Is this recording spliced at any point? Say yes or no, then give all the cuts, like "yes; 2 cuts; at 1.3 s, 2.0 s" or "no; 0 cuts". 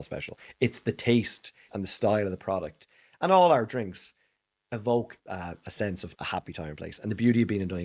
yes; 3 cuts; at 1.7 s, 5.2 s, 6.1 s